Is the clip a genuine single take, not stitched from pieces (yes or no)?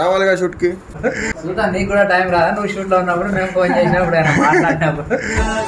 no